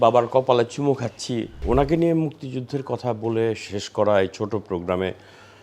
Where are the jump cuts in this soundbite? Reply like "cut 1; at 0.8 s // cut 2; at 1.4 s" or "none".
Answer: cut 1; at 1.5 s